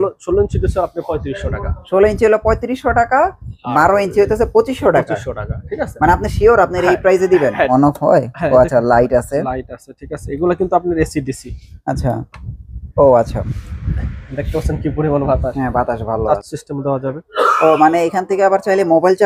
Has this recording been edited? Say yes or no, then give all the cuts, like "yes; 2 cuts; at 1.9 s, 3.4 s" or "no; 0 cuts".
yes; 2 cuts; at 7.7 s, 16.2 s